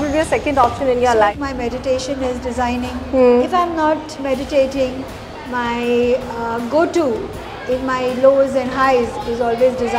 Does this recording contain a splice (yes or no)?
yes